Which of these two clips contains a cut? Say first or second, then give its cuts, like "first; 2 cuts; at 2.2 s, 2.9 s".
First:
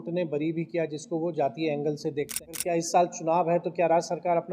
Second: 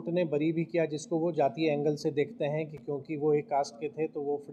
first; 1 cut; at 2.5 s